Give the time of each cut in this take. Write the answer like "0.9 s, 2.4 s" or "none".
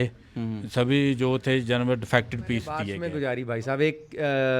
3.0 s